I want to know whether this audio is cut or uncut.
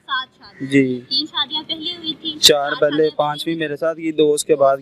uncut